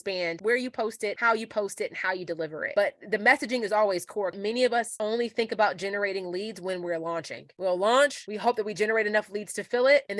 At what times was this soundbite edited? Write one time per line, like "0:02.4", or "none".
0:04.4